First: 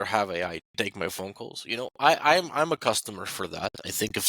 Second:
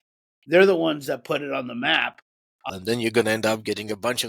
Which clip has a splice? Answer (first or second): second